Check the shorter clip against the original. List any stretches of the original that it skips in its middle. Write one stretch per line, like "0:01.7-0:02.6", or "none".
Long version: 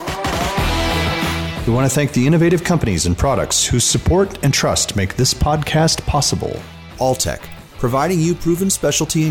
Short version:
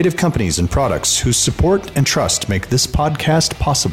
none